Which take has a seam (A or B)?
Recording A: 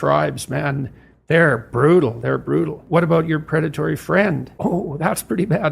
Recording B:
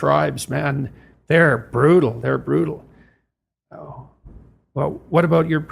A